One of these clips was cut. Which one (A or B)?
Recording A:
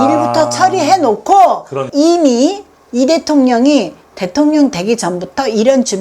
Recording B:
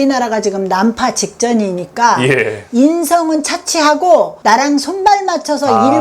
A